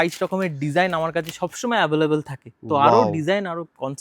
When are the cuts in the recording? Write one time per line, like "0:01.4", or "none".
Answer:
none